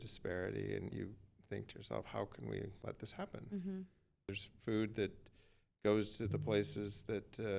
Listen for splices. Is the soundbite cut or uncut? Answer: cut